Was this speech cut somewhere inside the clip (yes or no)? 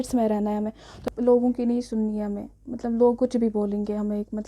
yes